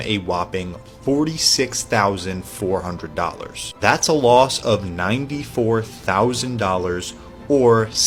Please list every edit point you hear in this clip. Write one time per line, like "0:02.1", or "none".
none